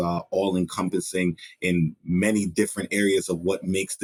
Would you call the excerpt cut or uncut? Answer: uncut